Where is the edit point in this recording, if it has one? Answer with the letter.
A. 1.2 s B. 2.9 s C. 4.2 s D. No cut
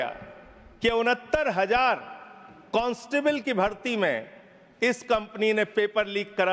D